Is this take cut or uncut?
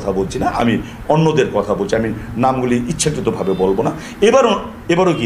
uncut